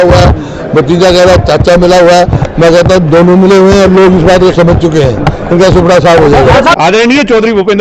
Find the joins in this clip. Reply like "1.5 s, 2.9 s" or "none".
6.7 s